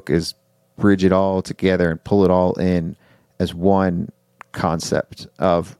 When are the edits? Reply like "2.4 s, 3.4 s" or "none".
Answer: none

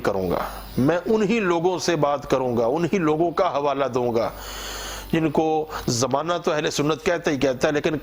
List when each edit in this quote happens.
none

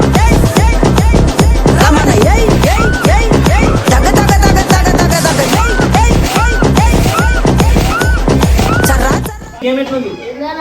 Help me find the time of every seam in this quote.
9.6 s

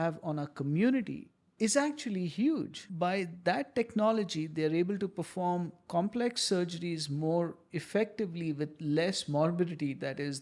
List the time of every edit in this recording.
2.7 s

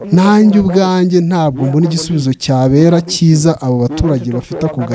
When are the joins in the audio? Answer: none

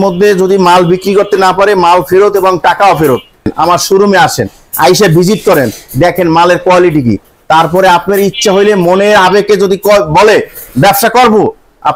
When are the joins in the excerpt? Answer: none

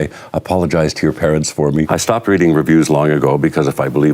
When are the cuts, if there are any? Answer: 1.9 s

